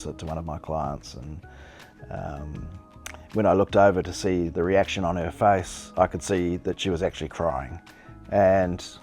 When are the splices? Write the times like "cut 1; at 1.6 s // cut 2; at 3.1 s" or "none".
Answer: cut 1; at 5.8 s